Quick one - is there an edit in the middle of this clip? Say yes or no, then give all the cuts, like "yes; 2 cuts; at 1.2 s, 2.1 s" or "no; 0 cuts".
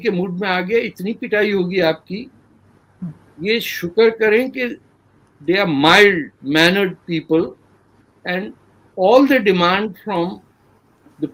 no; 0 cuts